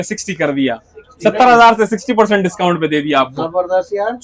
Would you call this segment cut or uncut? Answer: uncut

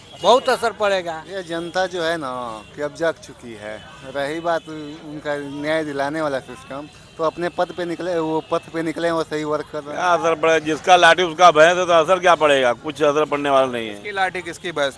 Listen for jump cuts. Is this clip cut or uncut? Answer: cut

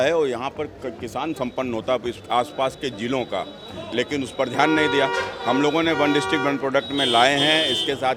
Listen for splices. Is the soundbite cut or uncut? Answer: uncut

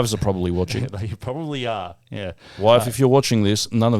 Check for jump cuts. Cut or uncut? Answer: uncut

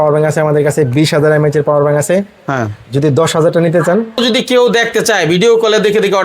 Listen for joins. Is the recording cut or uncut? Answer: cut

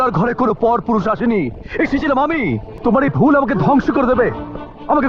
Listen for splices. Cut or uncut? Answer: cut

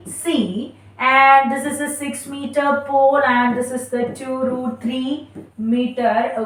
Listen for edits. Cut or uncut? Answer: uncut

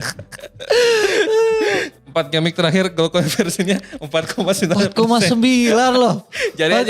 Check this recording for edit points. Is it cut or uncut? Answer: cut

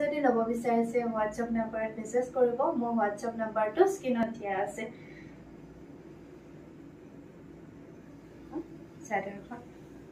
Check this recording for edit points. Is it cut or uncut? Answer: uncut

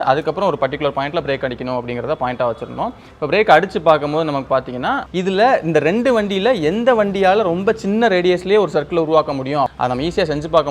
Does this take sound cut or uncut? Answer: cut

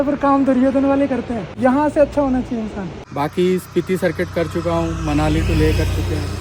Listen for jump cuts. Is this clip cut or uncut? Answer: cut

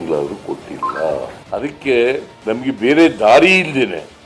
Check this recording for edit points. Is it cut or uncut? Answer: uncut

